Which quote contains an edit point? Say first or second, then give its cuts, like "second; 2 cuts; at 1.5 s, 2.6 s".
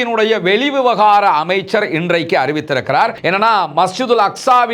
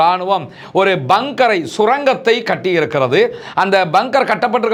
first; 1 cut; at 3.2 s